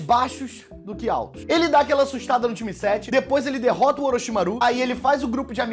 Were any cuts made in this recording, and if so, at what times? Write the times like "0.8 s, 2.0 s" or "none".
3.3 s